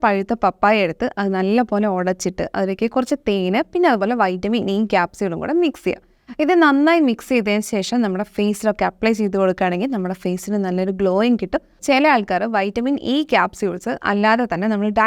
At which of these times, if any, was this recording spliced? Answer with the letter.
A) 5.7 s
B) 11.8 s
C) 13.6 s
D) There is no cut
B